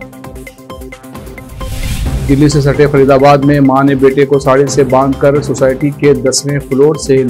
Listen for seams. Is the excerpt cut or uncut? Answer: cut